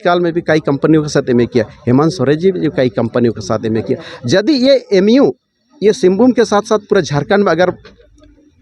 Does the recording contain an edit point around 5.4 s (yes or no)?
no